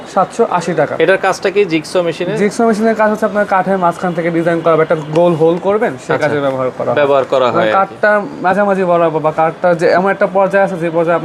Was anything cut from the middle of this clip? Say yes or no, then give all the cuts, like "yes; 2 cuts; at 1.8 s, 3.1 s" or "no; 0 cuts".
no; 0 cuts